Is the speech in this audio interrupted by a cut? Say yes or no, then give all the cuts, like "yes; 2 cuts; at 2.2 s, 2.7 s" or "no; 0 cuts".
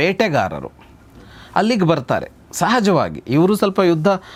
no; 0 cuts